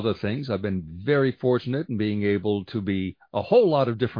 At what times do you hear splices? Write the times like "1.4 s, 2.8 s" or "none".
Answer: none